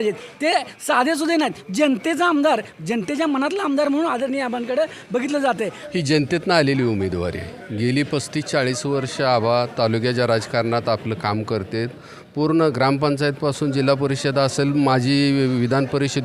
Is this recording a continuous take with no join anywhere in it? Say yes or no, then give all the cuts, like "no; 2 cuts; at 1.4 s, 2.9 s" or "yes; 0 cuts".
no; 1 cut; at 5.8 s